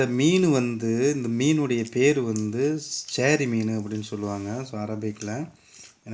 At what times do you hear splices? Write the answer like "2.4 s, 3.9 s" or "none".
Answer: none